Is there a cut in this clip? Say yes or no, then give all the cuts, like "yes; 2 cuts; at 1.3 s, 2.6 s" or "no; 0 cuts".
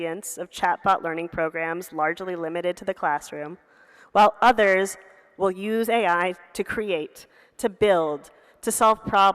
no; 0 cuts